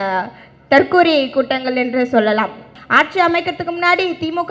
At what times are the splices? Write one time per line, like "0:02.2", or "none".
0:02.7